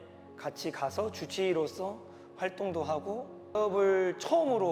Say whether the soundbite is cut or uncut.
cut